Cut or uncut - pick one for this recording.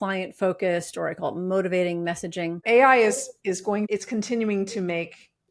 cut